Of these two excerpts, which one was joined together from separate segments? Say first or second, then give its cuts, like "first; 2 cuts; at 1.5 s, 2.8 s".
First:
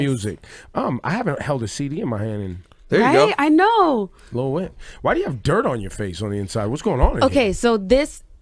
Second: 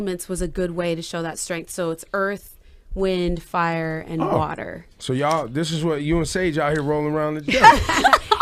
first; 1 cut; at 3.6 s